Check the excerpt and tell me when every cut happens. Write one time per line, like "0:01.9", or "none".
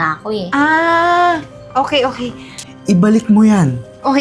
0:02.7